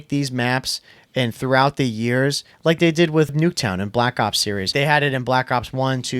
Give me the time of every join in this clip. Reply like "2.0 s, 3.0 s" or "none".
3.3 s, 4.7 s